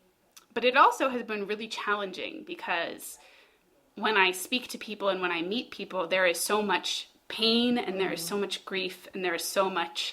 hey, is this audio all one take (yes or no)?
yes